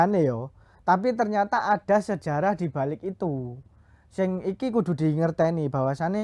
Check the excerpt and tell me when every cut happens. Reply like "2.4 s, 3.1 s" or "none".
none